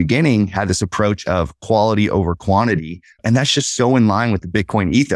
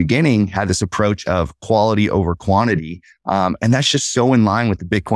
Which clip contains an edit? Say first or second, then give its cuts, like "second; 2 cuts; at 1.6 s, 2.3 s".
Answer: first; 1 cut; at 3.2 s